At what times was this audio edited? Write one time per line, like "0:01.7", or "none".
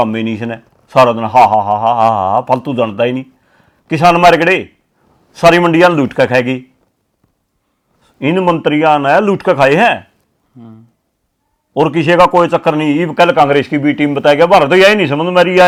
none